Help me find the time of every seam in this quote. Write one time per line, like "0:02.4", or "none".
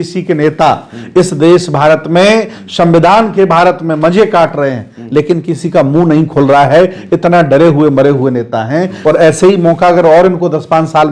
0:08.9